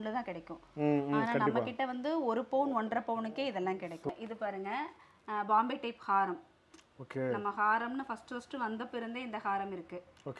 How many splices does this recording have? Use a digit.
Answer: 1